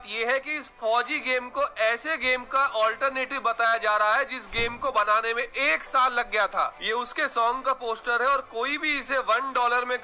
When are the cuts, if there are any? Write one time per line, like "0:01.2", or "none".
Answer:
0:06.7